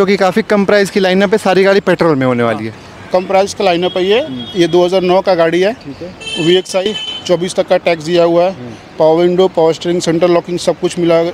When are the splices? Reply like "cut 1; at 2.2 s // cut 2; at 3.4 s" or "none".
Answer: none